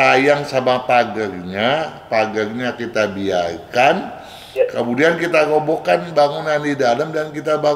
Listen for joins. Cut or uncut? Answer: uncut